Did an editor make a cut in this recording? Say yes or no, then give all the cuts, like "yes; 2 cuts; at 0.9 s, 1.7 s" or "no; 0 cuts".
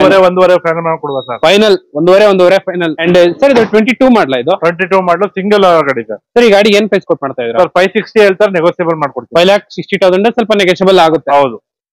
yes; 1 cut; at 2.9 s